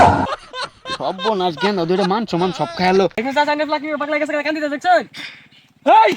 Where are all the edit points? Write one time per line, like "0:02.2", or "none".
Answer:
0:03.1